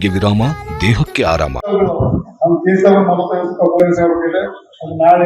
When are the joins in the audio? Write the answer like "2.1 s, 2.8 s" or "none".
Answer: 1.6 s